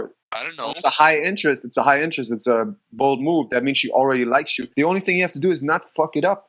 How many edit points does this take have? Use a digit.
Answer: 1